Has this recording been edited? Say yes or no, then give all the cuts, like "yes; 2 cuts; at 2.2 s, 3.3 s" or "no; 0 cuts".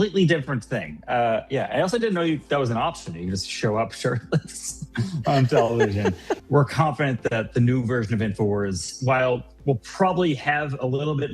yes; 1 cut; at 6.4 s